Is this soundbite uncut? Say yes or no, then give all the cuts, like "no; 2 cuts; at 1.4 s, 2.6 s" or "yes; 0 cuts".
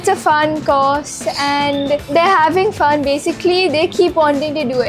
yes; 0 cuts